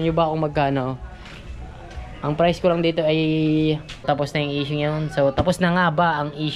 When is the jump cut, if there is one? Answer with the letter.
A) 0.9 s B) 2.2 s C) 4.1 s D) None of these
C